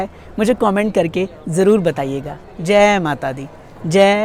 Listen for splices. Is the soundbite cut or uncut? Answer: uncut